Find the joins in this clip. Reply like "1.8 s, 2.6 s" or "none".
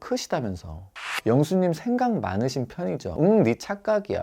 1.0 s, 3.1 s